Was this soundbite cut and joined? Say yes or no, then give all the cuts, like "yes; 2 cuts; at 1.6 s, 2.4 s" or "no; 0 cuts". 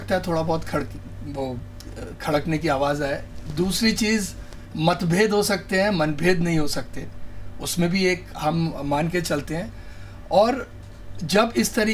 no; 0 cuts